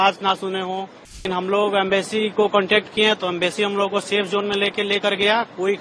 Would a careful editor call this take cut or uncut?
cut